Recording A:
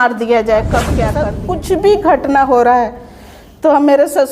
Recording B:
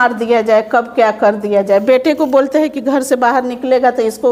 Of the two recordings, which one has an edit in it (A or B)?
A